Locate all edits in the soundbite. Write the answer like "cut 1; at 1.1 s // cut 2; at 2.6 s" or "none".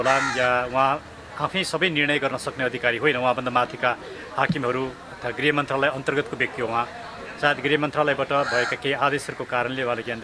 none